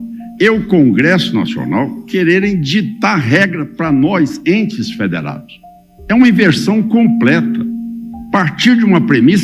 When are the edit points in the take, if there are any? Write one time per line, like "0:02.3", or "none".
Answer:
none

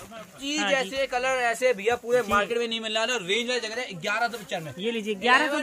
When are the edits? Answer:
none

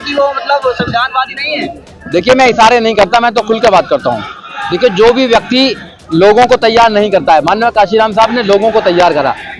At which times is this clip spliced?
none

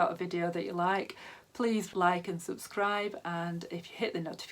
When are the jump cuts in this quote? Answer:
0:01.9

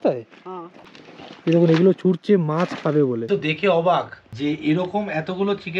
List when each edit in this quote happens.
0:03.3

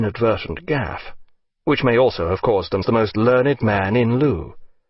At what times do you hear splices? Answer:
none

